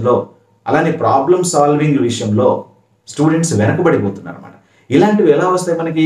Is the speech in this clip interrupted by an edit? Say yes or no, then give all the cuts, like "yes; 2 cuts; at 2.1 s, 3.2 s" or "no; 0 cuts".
no; 0 cuts